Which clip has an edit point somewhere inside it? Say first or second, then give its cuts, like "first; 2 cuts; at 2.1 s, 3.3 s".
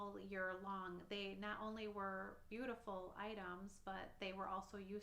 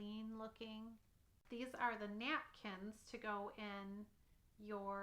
second; 1 cut; at 1.4 s